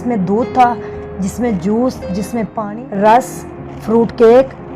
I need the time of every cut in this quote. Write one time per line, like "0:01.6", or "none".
0:02.6